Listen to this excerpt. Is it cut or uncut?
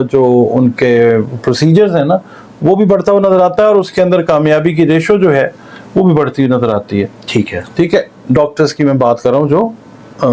uncut